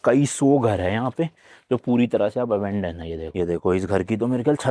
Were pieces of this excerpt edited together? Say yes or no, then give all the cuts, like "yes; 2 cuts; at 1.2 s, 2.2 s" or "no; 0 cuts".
yes; 1 cut; at 3.3 s